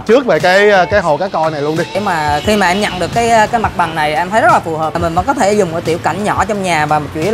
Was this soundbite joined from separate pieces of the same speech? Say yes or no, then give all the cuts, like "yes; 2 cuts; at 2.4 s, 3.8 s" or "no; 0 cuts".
yes; 2 cuts; at 1.9 s, 5.0 s